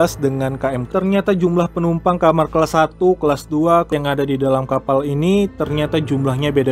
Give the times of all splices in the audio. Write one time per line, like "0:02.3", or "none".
0:00.9
0:03.9

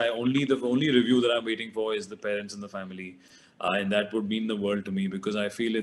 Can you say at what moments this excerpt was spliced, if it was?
none

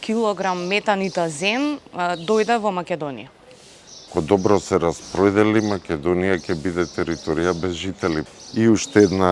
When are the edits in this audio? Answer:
0:04.1
0:08.3

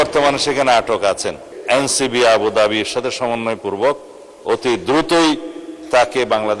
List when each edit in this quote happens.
0:01.4

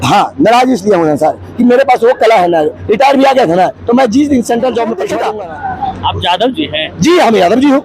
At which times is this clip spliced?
0:05.1

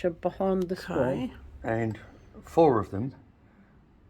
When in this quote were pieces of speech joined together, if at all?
0:01.2

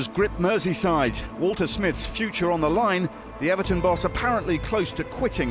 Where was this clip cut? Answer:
none

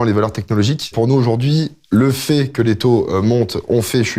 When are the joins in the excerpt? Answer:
0:00.9

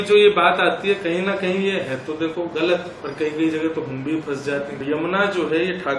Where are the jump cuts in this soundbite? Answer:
0:03.0
0:04.7

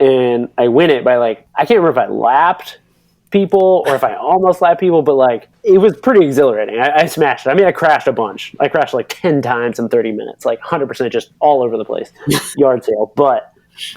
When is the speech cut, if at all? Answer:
0:01.4
0:05.5

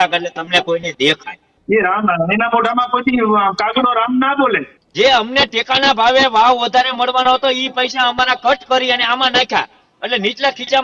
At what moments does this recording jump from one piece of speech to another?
0:01.5
0:04.8

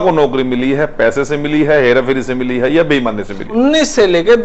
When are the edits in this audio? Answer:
0:03.4

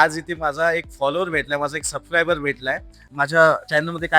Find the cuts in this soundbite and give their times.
0:03.1

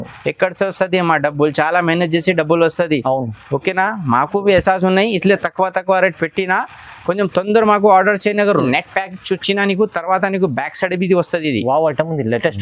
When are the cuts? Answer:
0:08.6

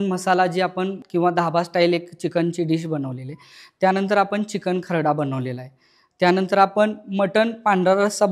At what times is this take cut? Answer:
0:01.0

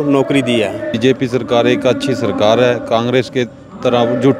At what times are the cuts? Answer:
0:00.9

